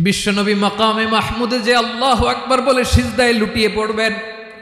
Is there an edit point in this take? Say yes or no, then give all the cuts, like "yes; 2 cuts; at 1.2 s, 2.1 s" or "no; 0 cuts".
no; 0 cuts